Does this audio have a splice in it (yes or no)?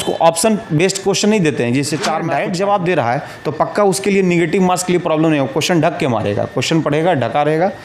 yes